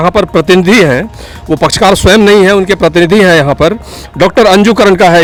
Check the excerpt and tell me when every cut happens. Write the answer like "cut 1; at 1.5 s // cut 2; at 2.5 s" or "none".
none